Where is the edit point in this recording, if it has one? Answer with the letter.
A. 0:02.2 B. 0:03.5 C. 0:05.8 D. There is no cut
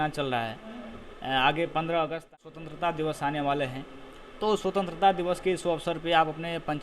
A